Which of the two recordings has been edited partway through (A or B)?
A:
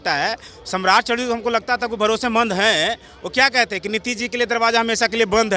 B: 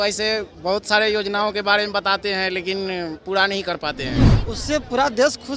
B